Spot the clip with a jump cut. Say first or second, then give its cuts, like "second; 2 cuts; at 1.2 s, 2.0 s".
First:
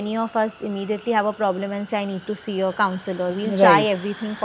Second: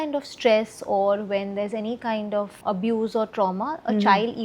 second; 1 cut; at 2.6 s